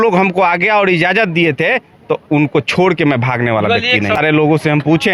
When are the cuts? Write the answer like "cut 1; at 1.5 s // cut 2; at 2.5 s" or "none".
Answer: cut 1; at 4.2 s